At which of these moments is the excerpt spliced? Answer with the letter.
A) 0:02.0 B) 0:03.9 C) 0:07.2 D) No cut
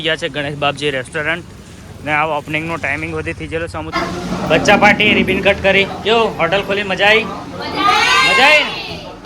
B